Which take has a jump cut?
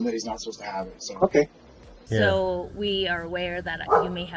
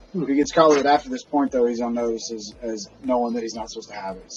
first; 1 cut; at 2.0 s

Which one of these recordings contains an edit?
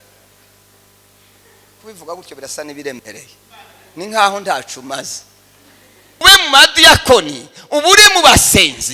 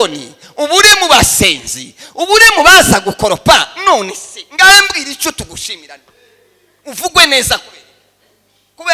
first; 1 cut; at 6.2 s

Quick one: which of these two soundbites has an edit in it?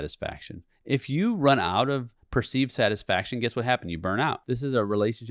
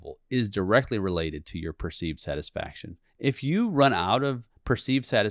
first; 1 cut; at 4.4 s

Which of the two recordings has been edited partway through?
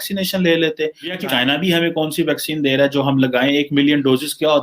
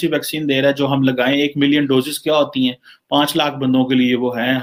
first; 1 cut; at 1.1 s

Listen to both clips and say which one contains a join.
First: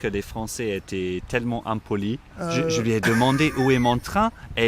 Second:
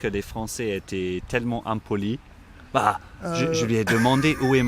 first; 1 cut; at 2.3 s

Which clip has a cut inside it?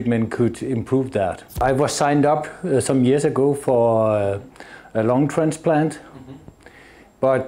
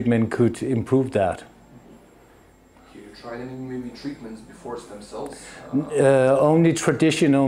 first; 1 cut; at 1.6 s

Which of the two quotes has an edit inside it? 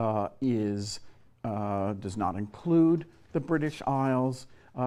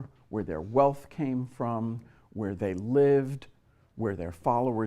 second; 1 cut; at 2.8 s

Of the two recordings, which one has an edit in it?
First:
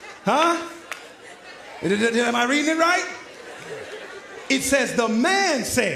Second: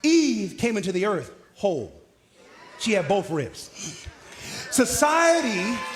first; 1 cut; at 3.6 s

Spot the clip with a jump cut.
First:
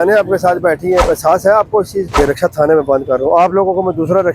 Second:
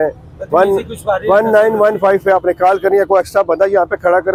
first; 2 cuts; at 1.0 s, 2.2 s

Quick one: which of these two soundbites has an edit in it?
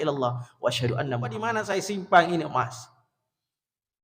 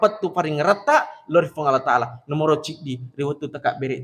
first; 1 cut; at 1.5 s

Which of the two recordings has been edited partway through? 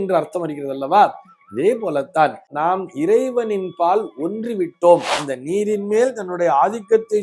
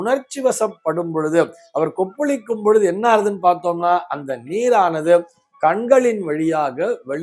first; 2 cuts; at 2.5 s, 5.3 s

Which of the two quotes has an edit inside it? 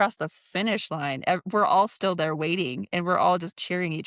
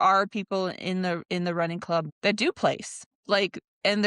second; 2 cuts; at 2.1 s, 3.1 s

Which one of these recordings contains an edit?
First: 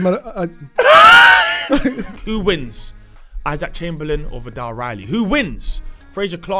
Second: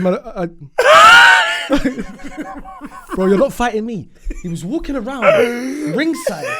first; 1 cut; at 2.2 s

